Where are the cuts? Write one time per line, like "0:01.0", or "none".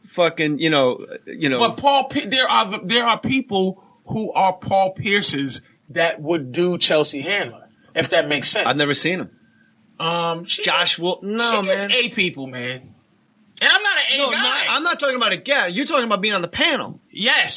0:03.5